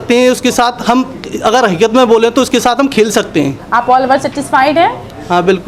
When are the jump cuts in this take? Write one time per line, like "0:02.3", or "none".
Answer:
none